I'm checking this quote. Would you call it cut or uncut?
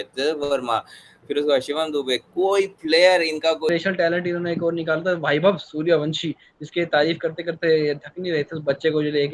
cut